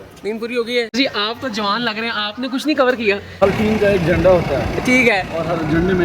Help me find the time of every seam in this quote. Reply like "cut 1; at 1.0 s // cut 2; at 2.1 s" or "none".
cut 1; at 1.0 s // cut 2; at 3.3 s